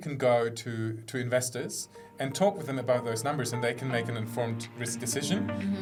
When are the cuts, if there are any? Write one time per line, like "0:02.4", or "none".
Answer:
none

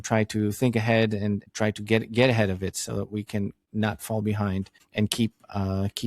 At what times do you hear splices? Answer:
0:01.5
0:03.6
0:04.8

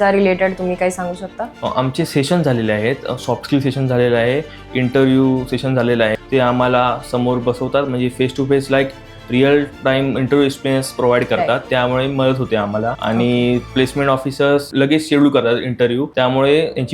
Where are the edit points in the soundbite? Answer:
0:06.1
0:11.6
0:13.0
0:13.7
0:14.7
0:16.1

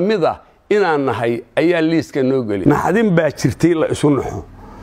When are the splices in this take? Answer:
0:02.6

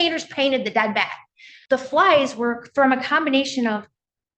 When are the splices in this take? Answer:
0:01.5

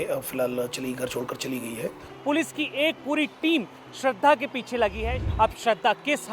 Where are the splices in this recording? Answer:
0:02.1
0:05.2

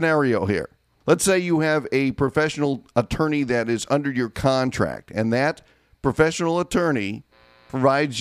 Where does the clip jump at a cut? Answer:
none

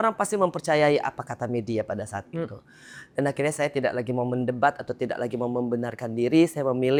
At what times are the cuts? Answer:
none

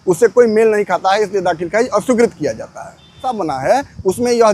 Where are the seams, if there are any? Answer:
0:03.4

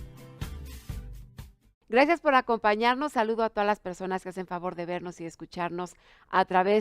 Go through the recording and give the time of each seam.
0:02.4

